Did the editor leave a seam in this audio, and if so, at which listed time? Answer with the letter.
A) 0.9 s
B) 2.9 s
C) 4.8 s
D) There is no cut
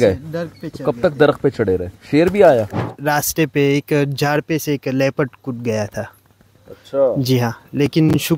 B